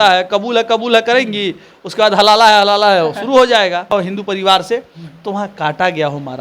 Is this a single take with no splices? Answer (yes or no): no